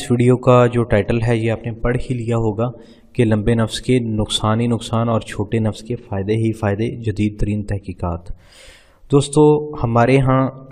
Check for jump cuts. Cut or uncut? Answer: uncut